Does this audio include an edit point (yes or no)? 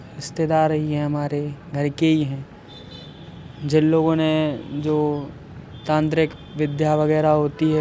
no